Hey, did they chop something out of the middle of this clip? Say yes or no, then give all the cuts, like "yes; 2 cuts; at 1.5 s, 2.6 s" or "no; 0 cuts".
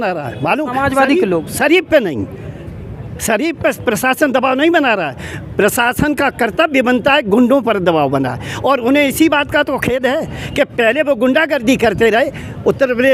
no; 0 cuts